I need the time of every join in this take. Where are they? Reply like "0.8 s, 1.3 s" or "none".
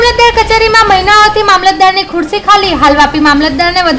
none